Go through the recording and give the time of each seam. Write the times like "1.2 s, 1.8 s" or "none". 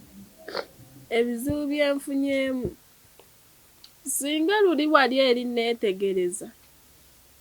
1.0 s